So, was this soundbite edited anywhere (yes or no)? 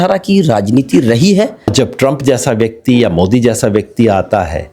yes